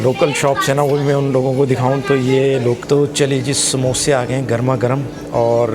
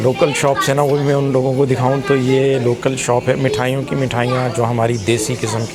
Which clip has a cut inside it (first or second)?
first